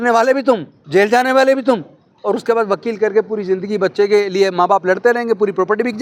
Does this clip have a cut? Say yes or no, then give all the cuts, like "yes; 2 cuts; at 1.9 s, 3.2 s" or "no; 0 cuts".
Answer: no; 0 cuts